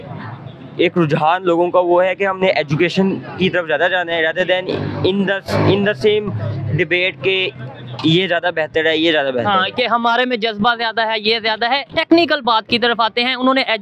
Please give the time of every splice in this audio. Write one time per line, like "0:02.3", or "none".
none